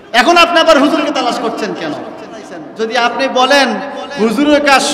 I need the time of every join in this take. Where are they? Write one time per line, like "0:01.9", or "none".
0:02.6